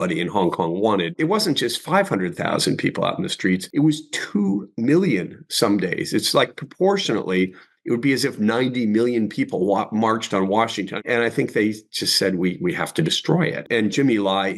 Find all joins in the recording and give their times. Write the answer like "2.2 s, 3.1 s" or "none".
1.1 s, 3.7 s, 11.0 s, 13.6 s